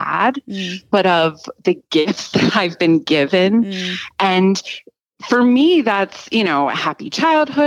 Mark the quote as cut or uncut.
uncut